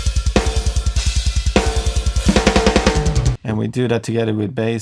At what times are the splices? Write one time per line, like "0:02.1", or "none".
0:03.2